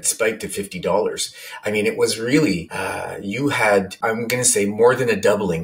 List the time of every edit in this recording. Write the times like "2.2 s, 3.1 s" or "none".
2.7 s, 3.9 s